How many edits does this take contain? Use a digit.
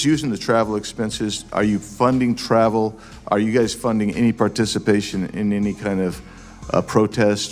0